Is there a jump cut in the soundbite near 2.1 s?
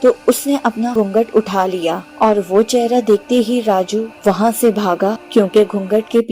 yes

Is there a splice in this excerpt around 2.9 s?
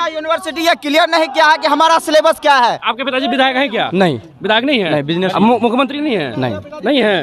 yes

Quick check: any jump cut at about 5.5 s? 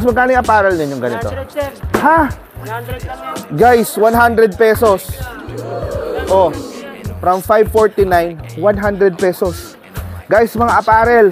no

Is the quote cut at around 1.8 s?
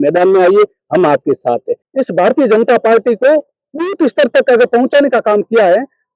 yes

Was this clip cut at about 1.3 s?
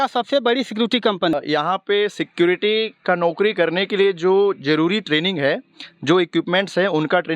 yes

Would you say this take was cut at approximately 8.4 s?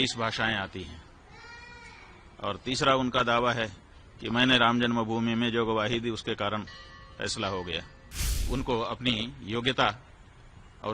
yes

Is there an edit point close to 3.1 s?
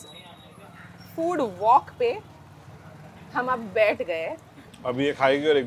no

